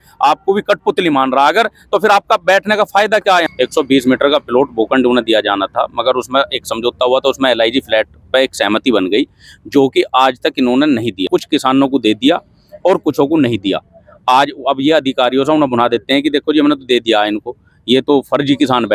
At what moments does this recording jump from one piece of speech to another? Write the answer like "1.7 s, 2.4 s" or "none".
3.5 s, 11.2 s